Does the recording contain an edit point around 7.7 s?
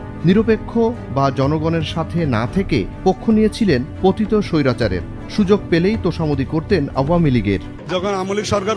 yes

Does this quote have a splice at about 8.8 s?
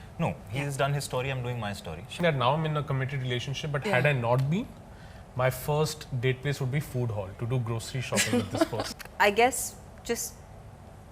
yes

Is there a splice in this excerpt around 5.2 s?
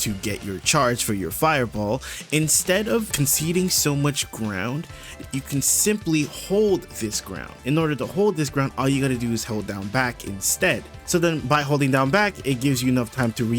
yes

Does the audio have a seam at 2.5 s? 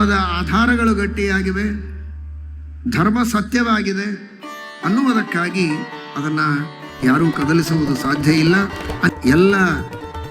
no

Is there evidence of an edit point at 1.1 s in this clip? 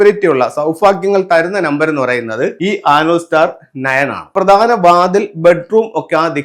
no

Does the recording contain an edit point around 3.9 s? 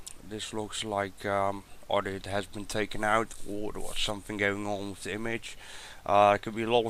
yes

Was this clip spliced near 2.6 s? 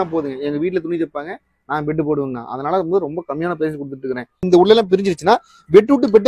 no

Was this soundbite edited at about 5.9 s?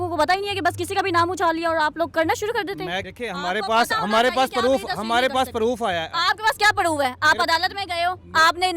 no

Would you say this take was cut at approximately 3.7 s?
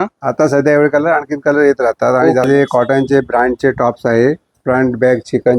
no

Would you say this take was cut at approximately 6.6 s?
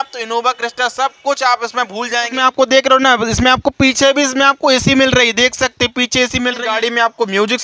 yes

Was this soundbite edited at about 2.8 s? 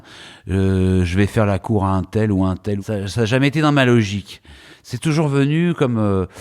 yes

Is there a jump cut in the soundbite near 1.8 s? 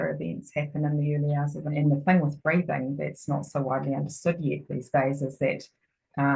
yes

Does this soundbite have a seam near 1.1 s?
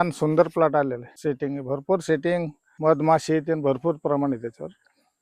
yes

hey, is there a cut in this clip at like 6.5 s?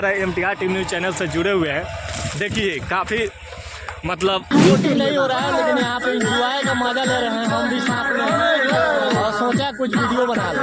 no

